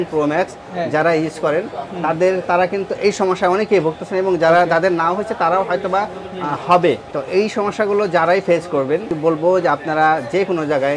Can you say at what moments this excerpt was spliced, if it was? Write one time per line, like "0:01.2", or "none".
0:07.1
0:09.2